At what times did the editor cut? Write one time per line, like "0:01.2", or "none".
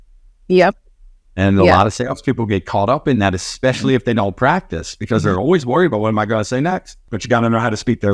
0:07.1

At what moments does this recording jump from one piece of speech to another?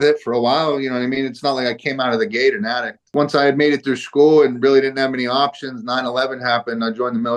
0:03.0

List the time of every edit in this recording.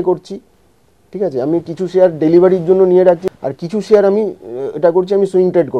0:03.2

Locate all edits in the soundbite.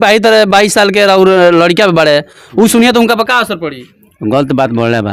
none

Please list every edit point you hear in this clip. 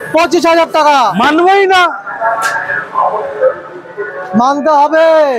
none

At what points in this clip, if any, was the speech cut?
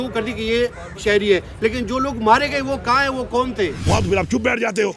0:03.8

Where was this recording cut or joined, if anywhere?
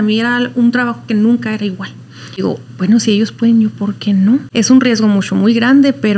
0:02.4
0:04.5

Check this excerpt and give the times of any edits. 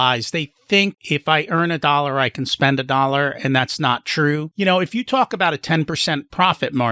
0:04.5

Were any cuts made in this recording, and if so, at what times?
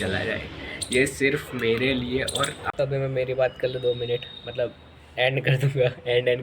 0:02.7

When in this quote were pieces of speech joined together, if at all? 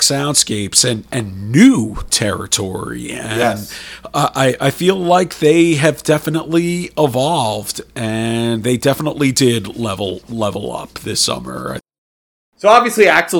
0:11.8

